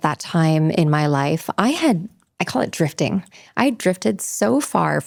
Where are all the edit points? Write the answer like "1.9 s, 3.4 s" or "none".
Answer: none